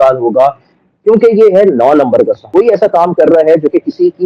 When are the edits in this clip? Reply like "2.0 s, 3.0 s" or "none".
2.4 s